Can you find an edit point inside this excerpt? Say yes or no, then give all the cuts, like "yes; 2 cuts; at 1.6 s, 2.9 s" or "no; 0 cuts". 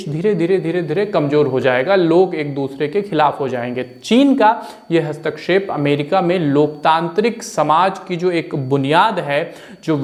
no; 0 cuts